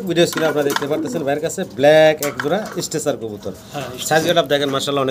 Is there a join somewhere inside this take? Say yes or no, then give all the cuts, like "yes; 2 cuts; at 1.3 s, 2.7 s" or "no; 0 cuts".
no; 0 cuts